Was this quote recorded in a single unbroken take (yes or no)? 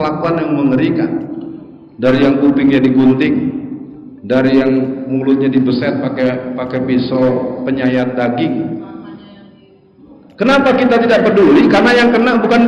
yes